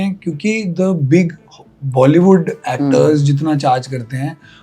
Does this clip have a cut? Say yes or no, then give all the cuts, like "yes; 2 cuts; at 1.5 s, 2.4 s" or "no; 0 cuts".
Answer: no; 0 cuts